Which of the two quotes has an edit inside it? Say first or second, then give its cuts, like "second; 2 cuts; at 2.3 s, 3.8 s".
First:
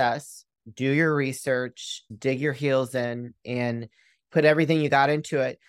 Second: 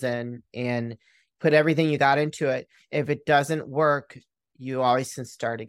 first; 1 cut; at 2.0 s